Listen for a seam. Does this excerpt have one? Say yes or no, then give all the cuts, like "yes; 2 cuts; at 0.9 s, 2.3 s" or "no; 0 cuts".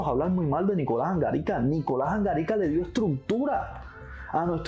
no; 0 cuts